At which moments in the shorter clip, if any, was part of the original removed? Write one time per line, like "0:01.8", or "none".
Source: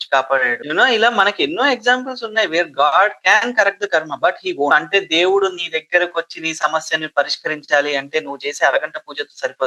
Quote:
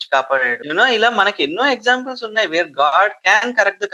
none